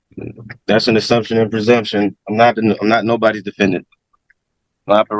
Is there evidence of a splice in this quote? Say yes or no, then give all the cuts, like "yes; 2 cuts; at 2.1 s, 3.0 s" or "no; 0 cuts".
no; 0 cuts